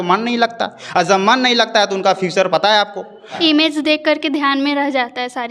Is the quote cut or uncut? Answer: cut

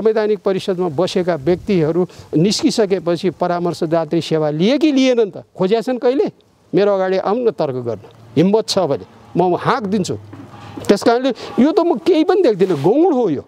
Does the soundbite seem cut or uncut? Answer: uncut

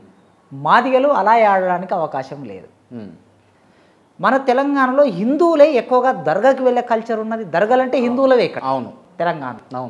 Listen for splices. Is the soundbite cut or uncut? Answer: cut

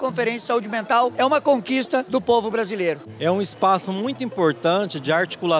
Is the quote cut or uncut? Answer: cut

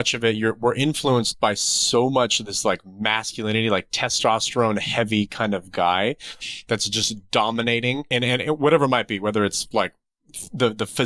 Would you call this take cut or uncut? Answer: cut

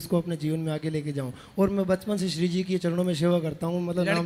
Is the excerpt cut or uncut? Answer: uncut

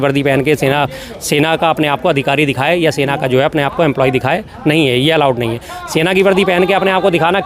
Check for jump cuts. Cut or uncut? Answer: uncut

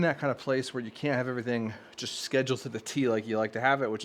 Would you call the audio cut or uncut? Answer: uncut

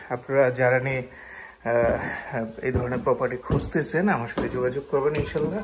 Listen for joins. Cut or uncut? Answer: uncut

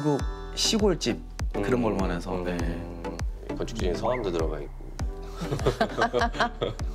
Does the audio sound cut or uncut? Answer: uncut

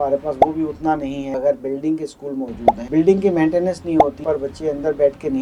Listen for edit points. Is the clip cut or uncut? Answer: cut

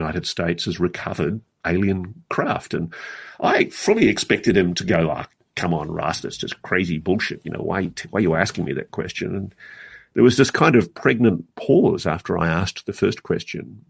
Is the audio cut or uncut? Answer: cut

